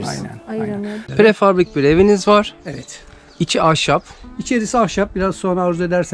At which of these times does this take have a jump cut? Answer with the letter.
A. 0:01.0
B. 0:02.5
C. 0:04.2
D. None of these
A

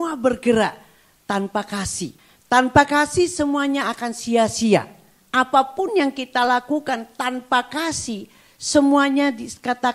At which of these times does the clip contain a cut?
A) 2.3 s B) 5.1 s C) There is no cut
A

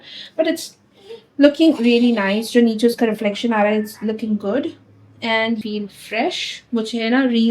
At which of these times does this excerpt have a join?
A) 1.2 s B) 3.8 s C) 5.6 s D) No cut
C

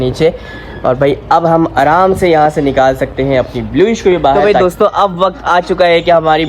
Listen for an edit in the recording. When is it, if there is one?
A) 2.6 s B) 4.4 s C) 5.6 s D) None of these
B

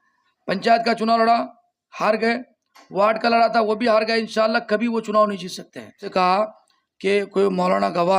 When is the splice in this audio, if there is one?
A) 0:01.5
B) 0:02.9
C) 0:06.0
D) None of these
C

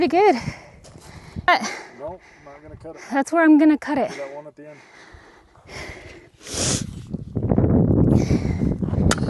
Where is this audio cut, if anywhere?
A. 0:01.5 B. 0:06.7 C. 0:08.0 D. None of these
A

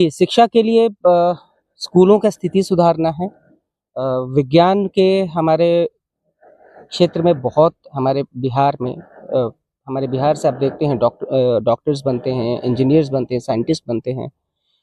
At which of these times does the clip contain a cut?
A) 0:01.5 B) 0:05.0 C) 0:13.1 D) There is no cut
D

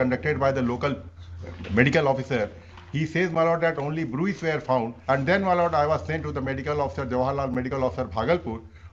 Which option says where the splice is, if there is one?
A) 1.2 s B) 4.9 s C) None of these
B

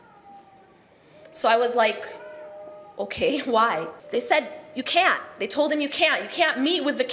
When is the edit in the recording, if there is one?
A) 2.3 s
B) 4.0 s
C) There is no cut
B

